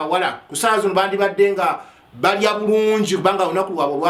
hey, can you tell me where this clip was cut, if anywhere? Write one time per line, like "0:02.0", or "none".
none